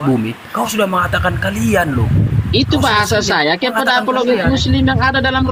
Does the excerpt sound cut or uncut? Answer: uncut